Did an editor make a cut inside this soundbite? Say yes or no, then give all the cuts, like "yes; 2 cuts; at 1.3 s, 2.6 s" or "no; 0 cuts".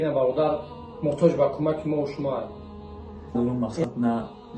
yes; 1 cut; at 3.3 s